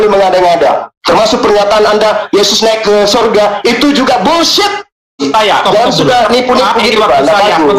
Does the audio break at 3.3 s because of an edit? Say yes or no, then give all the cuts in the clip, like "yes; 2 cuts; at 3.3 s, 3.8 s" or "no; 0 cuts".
no; 1 cut; at 5.2 s